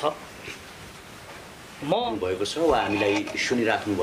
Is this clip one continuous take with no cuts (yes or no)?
no